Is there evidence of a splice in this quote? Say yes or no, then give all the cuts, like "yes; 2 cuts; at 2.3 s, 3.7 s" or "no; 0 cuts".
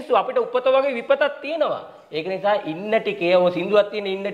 no; 0 cuts